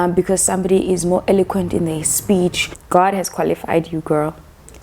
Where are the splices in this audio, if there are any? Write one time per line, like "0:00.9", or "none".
0:02.7